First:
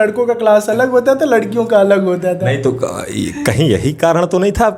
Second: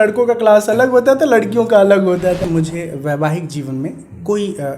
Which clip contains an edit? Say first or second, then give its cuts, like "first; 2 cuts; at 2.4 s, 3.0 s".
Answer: second; 1 cut; at 2.4 s